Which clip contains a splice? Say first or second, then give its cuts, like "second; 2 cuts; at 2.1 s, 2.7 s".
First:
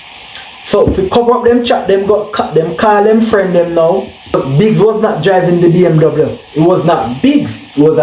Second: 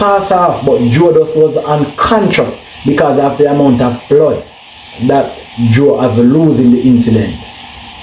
first; 1 cut; at 4.4 s